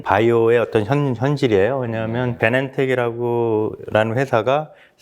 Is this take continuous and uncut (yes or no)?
no